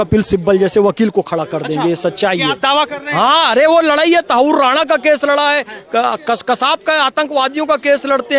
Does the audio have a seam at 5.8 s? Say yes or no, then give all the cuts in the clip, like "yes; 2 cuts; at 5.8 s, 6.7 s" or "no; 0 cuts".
no; 0 cuts